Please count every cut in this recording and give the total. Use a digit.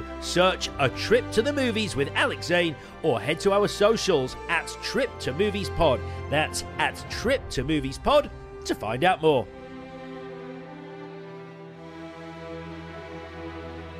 0